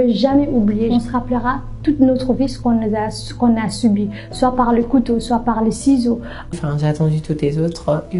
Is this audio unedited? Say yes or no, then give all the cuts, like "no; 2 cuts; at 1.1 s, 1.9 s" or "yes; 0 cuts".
no; 2 cuts; at 0.9 s, 6.5 s